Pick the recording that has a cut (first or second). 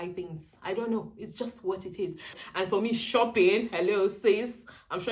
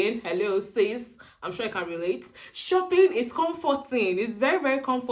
first